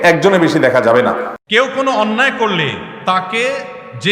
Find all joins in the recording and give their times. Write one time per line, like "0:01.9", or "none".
0:01.3